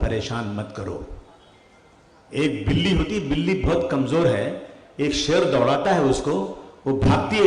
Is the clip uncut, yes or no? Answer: yes